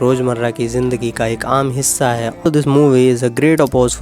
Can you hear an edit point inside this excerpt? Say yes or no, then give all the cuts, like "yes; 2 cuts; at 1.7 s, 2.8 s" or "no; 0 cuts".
yes; 1 cut; at 2.5 s